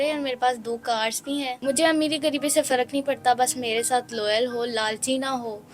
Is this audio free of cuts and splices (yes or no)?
no